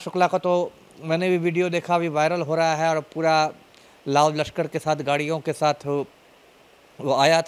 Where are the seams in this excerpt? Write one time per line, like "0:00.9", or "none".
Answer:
none